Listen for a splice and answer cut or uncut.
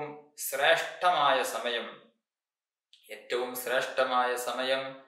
uncut